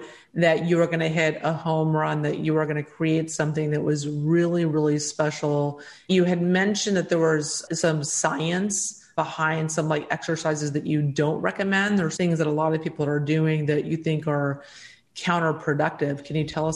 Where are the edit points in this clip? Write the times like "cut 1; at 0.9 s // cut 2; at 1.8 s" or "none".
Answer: cut 1; at 5.9 s // cut 2; at 9.1 s // cut 3; at 12.1 s